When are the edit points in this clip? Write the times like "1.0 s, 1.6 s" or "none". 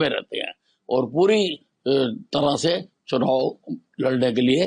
none